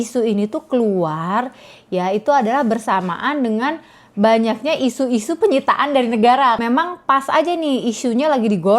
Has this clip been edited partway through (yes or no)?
yes